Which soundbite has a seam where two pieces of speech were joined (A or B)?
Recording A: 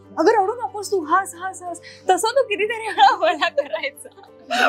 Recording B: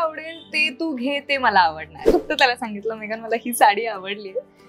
B